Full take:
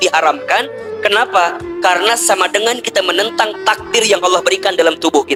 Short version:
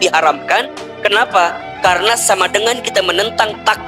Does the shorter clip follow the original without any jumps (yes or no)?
yes